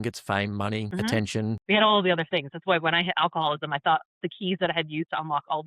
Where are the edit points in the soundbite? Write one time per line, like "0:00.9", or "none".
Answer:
0:00.9
0:01.6